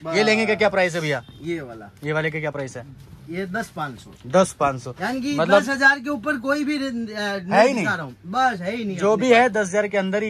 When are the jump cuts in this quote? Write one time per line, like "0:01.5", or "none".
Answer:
none